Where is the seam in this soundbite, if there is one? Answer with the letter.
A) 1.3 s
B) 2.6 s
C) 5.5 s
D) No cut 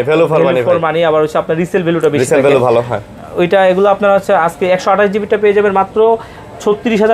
D